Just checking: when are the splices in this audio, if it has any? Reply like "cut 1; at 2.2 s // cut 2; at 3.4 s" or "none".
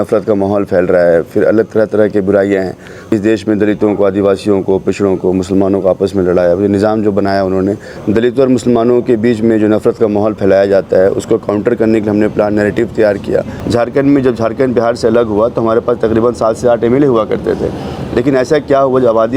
cut 1; at 2.9 s // cut 2; at 7.9 s // cut 3; at 13.6 s